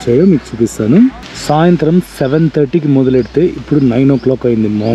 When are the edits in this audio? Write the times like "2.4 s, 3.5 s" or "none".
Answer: 1.3 s